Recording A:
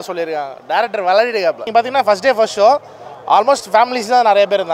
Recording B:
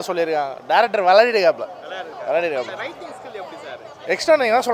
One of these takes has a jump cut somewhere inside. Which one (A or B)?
A